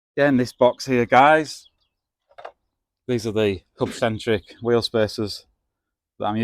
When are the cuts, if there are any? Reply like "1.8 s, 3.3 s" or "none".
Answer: none

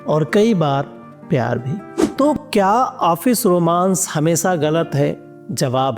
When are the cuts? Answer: 2.1 s

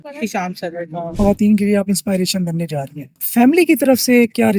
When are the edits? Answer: 1.1 s, 3.2 s

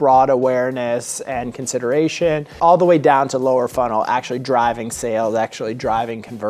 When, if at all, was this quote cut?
2.5 s

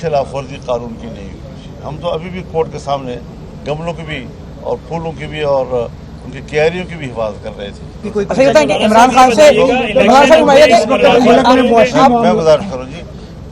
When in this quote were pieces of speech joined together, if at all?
8.0 s

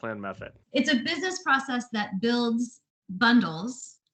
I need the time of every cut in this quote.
none

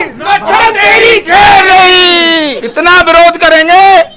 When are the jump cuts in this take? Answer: 2.6 s

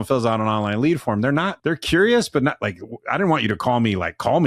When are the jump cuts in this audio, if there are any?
1.5 s

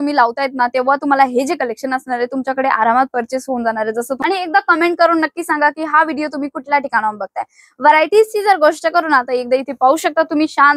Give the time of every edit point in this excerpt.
4.2 s

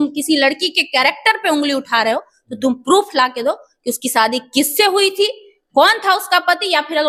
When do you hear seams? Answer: none

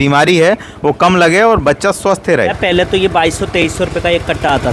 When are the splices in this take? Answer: 2.6 s

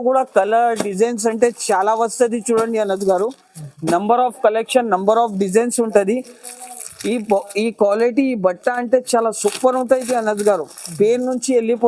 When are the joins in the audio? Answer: none

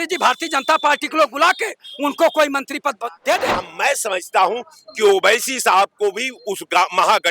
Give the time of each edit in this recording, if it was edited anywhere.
3.5 s

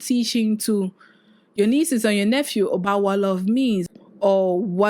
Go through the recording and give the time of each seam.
3.9 s

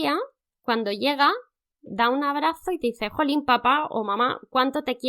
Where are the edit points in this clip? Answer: 1.8 s

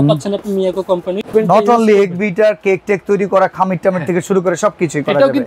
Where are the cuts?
1.3 s

